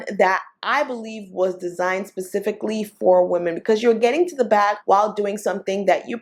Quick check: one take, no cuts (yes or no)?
yes